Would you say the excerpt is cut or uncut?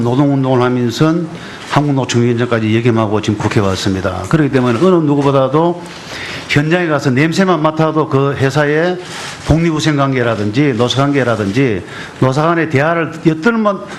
uncut